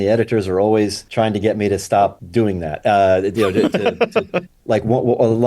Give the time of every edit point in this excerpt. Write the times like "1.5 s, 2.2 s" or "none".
1.0 s, 2.2 s